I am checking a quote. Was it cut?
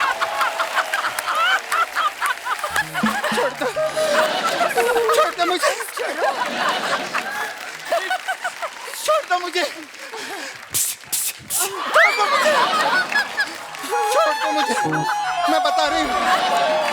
yes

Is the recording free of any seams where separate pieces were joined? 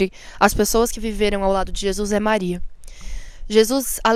yes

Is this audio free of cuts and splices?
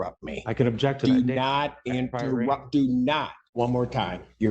no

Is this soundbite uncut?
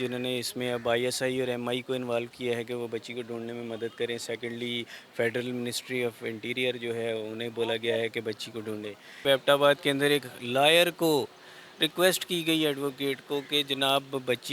no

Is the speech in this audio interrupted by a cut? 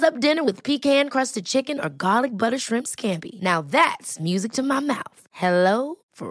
no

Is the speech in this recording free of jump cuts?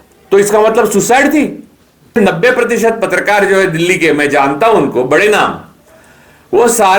no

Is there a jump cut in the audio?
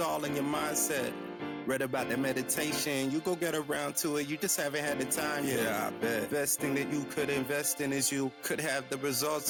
no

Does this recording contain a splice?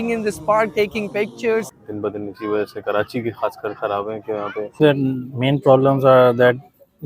yes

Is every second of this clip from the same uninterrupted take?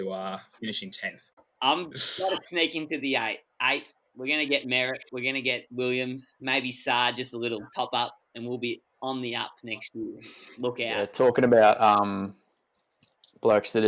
no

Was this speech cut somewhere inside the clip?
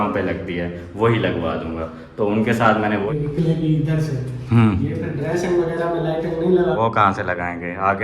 yes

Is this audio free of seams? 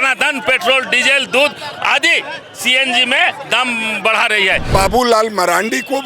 no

